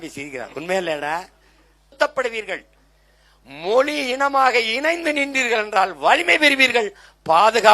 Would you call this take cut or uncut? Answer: cut